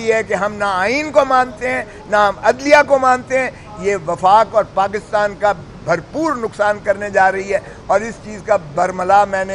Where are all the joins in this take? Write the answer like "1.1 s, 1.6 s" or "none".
none